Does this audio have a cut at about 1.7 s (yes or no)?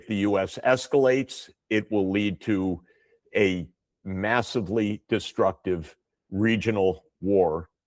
no